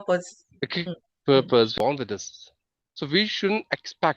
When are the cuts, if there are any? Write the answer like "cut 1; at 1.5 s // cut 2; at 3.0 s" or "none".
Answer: cut 1; at 1.7 s